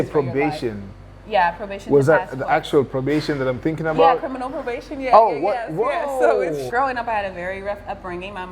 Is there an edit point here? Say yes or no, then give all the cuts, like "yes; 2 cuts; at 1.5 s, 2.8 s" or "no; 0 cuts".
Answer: yes; 1 cut; at 6.7 s